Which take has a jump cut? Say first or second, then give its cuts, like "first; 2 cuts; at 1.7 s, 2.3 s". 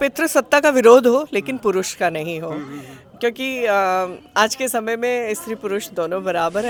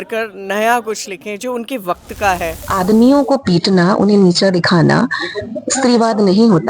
second; 1 cut; at 2.6 s